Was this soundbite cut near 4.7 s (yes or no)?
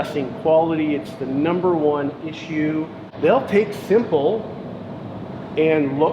no